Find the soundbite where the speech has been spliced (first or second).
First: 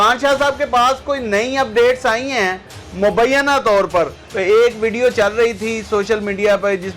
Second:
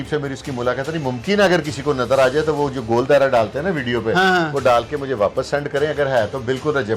first